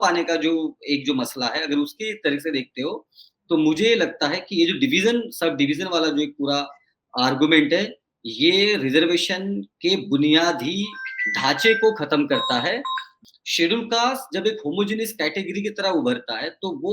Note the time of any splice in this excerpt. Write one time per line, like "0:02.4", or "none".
0:13.1